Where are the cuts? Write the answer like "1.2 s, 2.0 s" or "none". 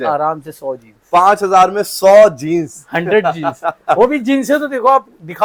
none